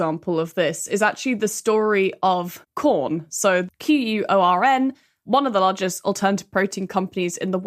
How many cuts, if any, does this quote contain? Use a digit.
2